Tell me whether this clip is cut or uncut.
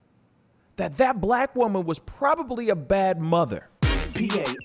cut